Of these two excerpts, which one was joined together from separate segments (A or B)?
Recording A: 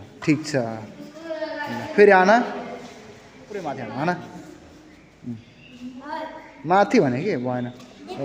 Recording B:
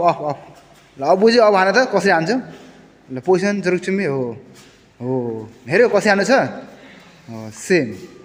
A